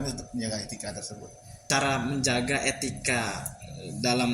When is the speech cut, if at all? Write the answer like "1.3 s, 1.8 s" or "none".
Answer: 1.5 s